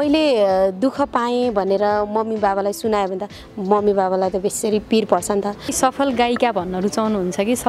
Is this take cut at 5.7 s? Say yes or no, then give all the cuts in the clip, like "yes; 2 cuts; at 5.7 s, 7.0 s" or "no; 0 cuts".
yes; 1 cut; at 5.7 s